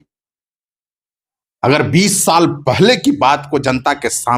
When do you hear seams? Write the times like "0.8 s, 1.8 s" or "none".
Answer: none

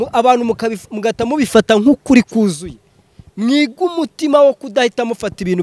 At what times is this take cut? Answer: none

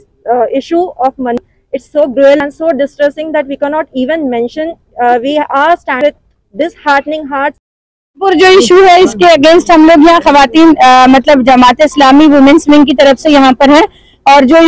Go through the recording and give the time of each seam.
8.1 s

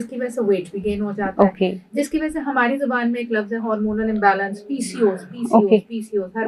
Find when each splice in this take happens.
none

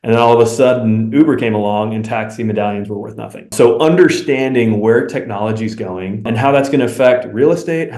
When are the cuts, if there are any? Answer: 3.5 s, 6.2 s

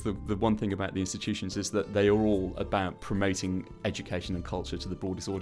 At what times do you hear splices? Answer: none

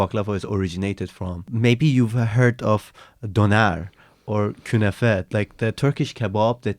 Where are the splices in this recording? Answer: 1.5 s

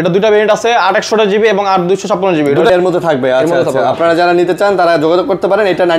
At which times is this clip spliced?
2.7 s

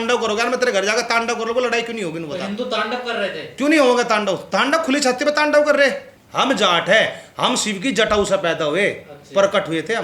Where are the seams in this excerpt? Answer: 6.1 s

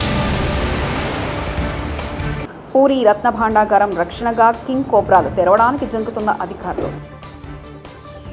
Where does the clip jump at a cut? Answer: 2.4 s

